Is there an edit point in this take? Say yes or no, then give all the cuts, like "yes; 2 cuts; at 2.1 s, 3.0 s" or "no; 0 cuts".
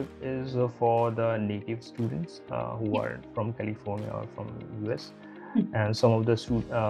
no; 0 cuts